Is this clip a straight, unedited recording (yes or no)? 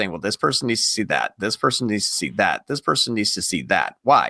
yes